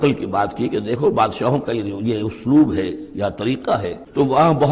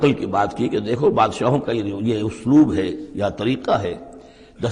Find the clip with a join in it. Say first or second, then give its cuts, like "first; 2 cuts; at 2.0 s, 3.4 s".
first; 1 cut; at 3.6 s